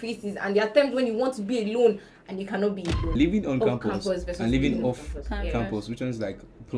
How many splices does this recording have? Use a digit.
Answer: 1